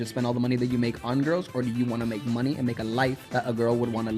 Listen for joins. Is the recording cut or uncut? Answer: cut